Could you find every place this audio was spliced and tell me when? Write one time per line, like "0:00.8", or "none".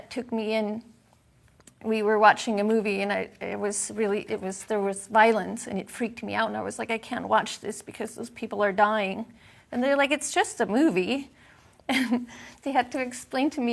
none